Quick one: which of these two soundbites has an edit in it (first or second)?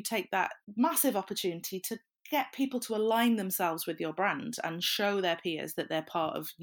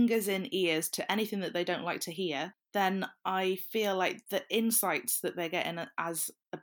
second